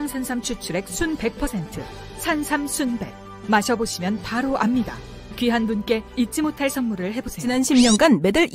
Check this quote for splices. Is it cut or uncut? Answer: cut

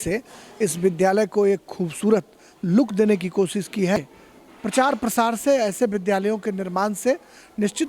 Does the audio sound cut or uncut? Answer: cut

